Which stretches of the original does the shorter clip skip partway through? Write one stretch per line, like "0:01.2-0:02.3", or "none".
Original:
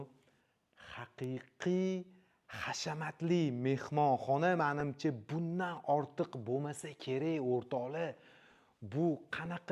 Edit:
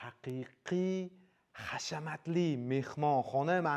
none